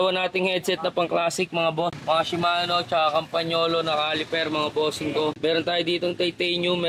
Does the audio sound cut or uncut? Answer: cut